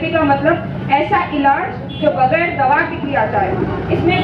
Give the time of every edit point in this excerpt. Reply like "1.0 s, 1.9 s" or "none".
none